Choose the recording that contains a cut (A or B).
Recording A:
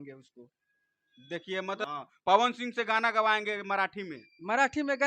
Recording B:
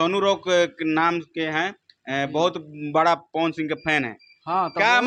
A